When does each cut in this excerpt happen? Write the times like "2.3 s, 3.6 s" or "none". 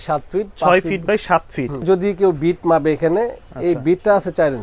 1.8 s